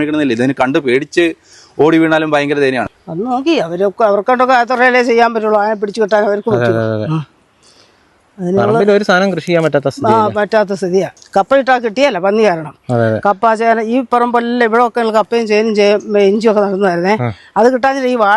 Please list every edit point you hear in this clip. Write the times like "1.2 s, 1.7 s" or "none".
2.8 s, 11.2 s